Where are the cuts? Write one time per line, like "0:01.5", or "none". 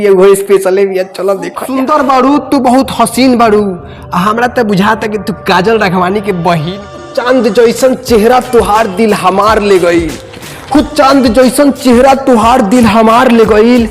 0:01.7
0:07.1